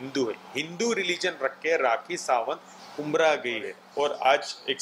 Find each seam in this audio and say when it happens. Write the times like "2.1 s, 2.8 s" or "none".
3.8 s